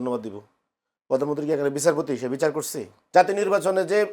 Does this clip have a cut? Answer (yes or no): yes